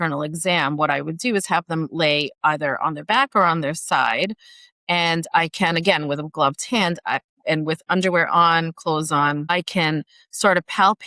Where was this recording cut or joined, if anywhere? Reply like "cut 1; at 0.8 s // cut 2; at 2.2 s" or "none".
none